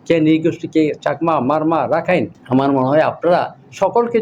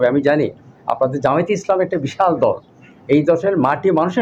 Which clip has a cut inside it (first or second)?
first